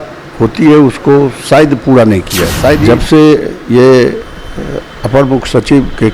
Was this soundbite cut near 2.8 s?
yes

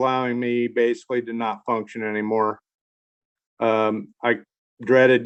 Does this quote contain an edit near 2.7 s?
no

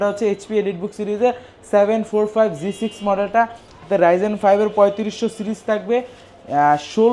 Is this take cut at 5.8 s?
no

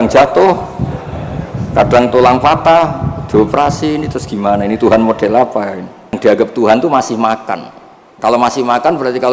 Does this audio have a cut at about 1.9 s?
no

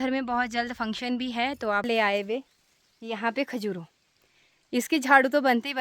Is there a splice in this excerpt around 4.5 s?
no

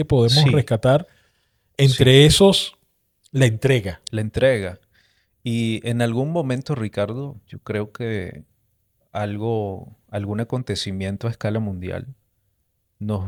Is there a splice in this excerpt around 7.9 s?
no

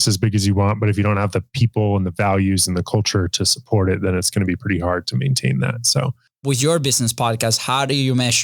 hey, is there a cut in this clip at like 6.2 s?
yes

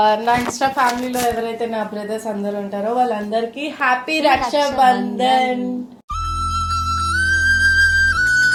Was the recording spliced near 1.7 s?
no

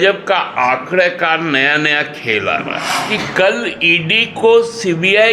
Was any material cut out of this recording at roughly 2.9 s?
yes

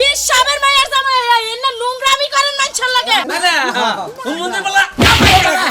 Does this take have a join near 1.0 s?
no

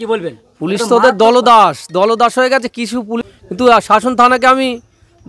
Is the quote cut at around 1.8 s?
no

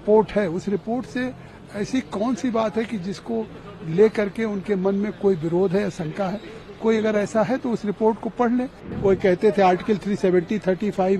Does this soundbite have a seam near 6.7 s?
no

